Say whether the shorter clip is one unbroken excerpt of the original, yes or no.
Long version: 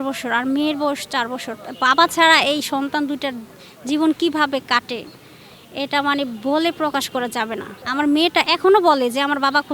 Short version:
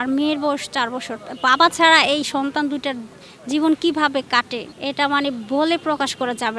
no